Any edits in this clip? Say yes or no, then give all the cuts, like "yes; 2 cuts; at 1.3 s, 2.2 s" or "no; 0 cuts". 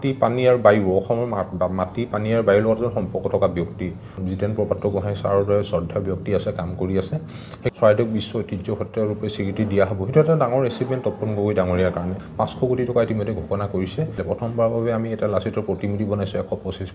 yes; 4 cuts; at 4.2 s, 7.6 s, 12.2 s, 14.2 s